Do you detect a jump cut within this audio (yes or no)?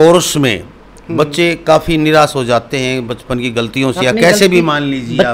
no